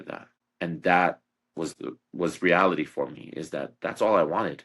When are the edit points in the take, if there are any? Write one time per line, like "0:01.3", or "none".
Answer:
0:01.7